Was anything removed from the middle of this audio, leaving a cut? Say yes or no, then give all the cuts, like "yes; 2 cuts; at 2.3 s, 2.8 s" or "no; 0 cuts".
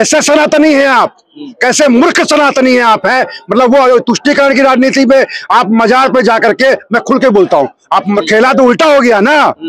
yes; 1 cut; at 8.1 s